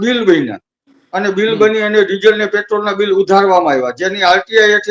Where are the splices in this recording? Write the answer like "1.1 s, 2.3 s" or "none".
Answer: none